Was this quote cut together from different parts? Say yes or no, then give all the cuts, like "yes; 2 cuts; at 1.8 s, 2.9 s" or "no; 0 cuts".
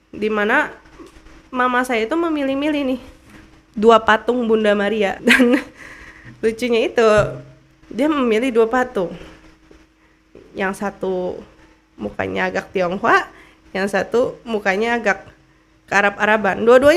yes; 1 cut; at 5.2 s